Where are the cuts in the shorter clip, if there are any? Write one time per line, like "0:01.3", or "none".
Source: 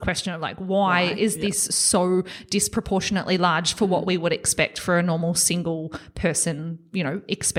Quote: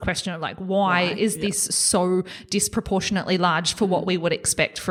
none